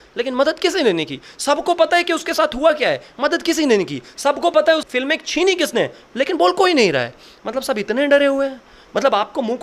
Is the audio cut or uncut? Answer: uncut